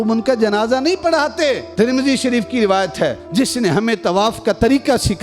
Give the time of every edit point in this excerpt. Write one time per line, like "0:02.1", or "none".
0:03.1